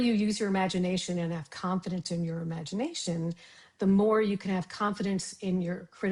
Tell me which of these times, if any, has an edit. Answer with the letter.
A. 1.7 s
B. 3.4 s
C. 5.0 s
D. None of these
D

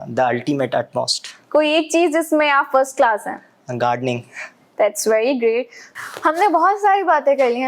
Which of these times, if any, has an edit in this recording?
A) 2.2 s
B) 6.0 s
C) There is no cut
C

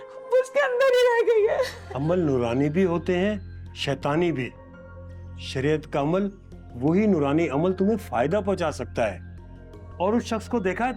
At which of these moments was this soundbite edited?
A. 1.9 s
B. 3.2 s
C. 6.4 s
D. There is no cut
A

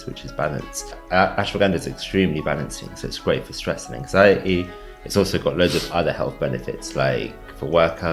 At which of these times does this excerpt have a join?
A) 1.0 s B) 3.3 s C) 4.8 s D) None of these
A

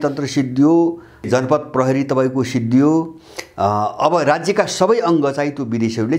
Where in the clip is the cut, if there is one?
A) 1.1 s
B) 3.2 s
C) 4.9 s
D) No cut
D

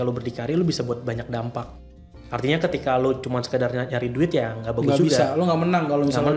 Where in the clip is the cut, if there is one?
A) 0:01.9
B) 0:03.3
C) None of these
C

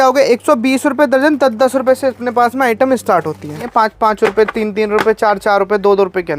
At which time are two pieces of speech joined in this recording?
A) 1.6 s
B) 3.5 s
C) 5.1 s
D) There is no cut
B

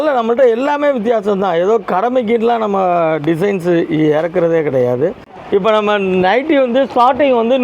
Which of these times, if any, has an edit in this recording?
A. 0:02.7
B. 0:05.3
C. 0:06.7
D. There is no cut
B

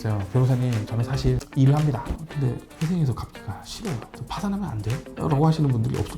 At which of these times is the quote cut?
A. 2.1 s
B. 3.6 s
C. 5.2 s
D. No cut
A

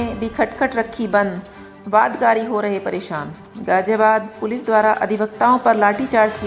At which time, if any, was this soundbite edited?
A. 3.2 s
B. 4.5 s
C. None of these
C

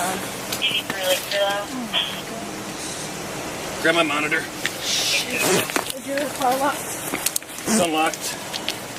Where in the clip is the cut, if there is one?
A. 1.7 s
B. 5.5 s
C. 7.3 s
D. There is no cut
D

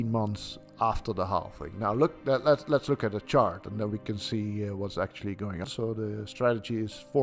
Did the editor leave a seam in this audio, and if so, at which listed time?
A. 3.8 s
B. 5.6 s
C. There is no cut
B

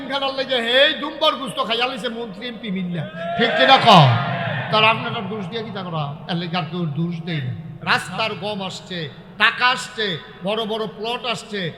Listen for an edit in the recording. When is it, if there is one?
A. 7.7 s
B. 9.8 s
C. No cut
A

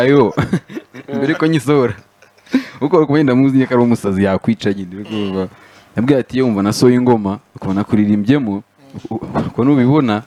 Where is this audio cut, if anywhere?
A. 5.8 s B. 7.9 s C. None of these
C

